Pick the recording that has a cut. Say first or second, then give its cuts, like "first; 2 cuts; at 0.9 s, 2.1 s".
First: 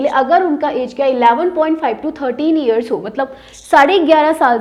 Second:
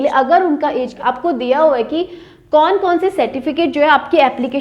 second; 1 cut; at 0.9 s